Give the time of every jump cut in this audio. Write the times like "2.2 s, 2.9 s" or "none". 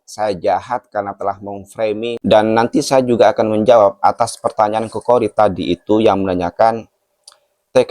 2.1 s